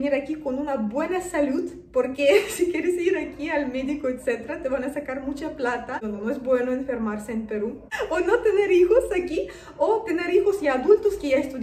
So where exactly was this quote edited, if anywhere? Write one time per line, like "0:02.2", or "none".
0:06.0
0:07.9